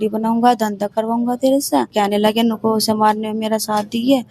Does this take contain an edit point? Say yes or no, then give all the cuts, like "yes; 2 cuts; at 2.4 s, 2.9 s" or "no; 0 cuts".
yes; 1 cut; at 1.9 s